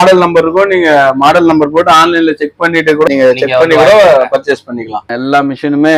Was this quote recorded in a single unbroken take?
no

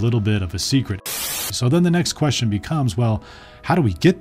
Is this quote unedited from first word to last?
no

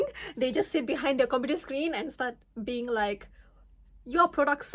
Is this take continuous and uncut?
yes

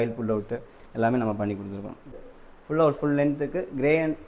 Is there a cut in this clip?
yes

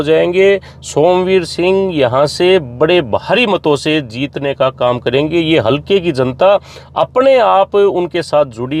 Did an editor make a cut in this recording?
no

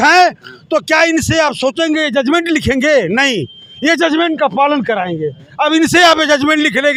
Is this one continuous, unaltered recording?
yes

